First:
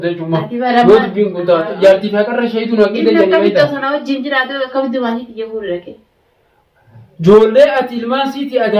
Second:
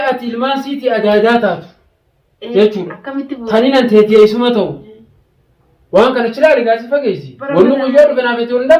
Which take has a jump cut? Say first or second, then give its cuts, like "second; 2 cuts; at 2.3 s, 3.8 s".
first; 1 cut; at 1.7 s